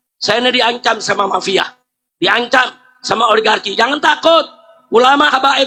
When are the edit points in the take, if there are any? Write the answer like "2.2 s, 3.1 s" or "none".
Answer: none